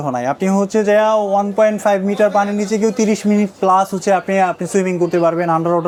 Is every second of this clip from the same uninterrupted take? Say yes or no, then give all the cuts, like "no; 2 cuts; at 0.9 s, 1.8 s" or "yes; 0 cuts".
yes; 0 cuts